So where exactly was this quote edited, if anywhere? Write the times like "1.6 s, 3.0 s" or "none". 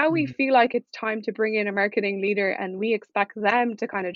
none